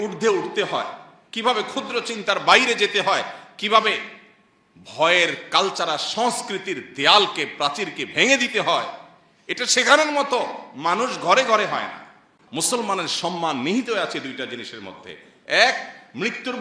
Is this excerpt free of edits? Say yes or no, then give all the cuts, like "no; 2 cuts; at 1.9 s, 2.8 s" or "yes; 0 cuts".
no; 1 cut; at 12.3 s